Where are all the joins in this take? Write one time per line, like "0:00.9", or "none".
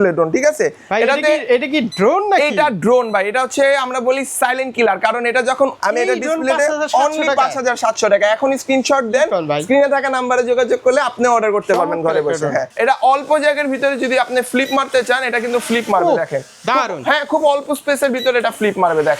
0:05.8
0:12.7